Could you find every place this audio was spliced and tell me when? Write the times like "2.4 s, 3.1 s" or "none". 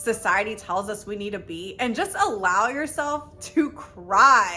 none

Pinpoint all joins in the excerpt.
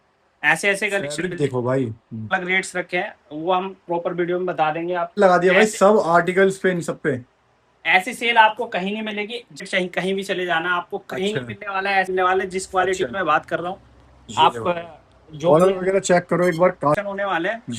2.3 s, 5.2 s, 9.6 s, 12.1 s, 17.0 s

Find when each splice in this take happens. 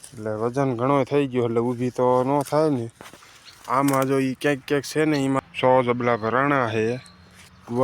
5.4 s

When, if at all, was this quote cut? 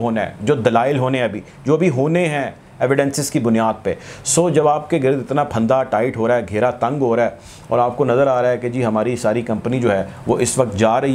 none

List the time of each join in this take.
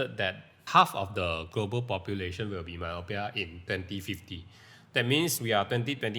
none

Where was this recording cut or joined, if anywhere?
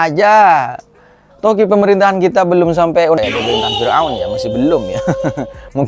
3.2 s

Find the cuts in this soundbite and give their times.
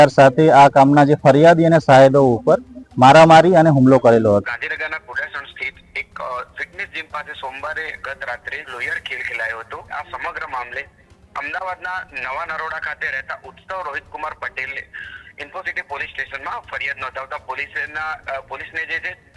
4.4 s, 8.7 s, 9.9 s

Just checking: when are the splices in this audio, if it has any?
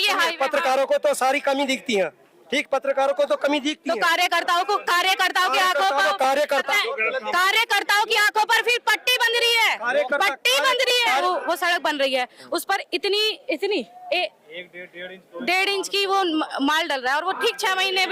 6.7 s, 11.2 s

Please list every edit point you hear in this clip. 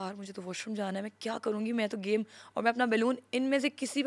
none

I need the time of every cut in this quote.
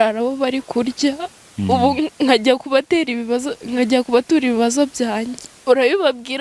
5.5 s

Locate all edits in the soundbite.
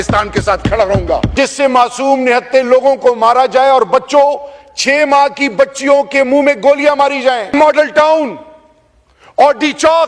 1.3 s, 7.5 s

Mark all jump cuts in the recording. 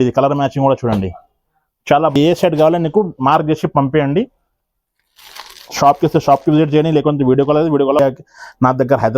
2.2 s, 8.0 s

